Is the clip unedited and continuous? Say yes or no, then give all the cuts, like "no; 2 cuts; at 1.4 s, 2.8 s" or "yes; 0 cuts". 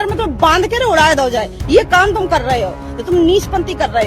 yes; 0 cuts